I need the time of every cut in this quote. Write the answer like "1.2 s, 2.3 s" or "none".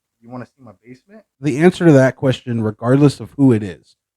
1.2 s